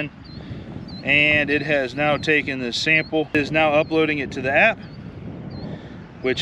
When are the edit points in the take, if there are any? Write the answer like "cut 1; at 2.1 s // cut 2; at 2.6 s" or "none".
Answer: cut 1; at 3.3 s

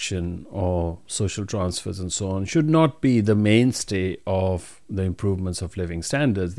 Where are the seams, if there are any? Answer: cut 1; at 1.0 s

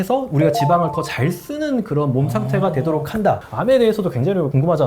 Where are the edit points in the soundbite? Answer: cut 1; at 3.4 s

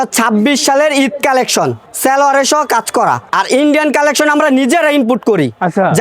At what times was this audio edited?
cut 1; at 1.8 s // cut 2; at 3.3 s

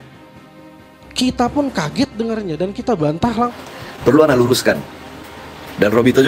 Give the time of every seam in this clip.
cut 1; at 3.6 s

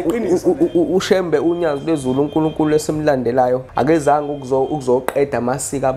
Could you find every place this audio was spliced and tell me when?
cut 1; at 3.7 s

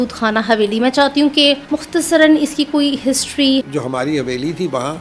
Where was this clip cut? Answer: cut 1; at 1.6 s // cut 2; at 3.7 s

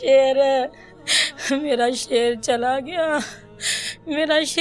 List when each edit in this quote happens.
cut 1; at 3.7 s

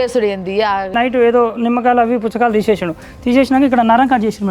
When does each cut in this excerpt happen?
cut 1; at 0.9 s

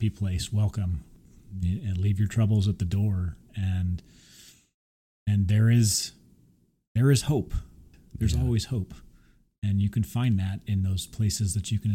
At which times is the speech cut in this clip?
cut 1; at 1.2 s // cut 2; at 7.9 s

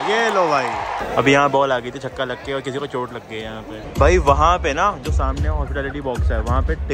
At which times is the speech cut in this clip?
cut 1; at 1.0 s // cut 2; at 3.7 s

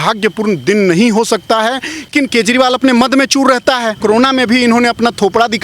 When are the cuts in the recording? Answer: cut 1; at 2.1 s // cut 2; at 4.0 s

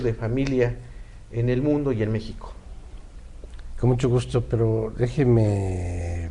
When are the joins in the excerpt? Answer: none

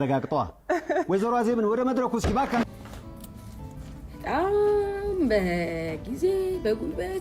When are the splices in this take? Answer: cut 1; at 2.6 s

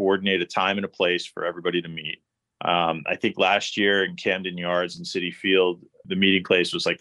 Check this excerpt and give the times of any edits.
cut 1; at 6.0 s

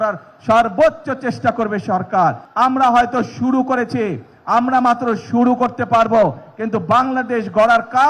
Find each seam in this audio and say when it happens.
cut 1; at 2.4 s

